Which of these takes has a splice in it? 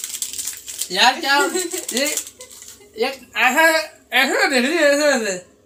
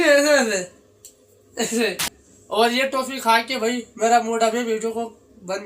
second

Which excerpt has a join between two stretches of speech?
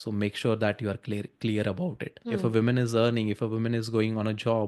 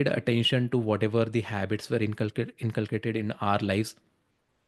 first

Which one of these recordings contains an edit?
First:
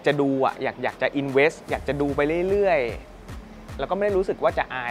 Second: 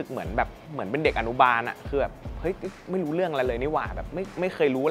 first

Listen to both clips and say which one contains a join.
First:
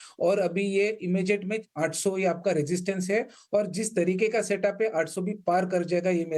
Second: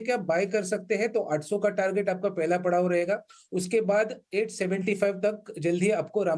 first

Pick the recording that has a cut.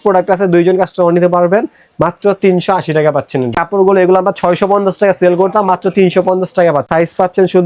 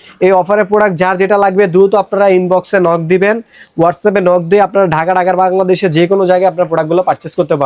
first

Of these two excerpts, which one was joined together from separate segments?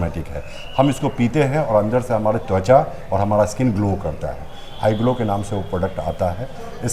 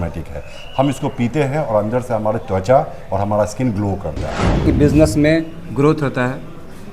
second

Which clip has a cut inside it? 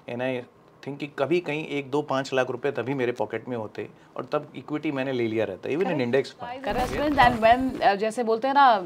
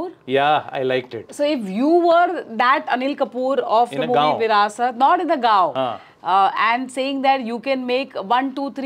first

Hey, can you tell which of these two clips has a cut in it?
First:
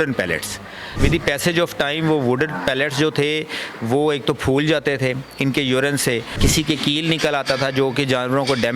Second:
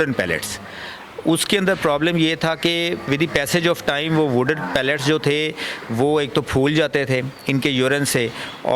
first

